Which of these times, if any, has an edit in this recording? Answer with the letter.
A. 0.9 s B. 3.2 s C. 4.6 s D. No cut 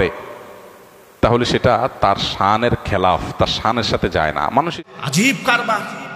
C